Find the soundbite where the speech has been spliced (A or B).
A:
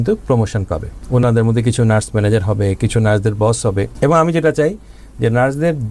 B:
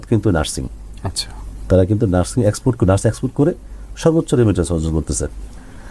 A